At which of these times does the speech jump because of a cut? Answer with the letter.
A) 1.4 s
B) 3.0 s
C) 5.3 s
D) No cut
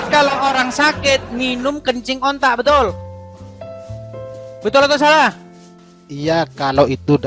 D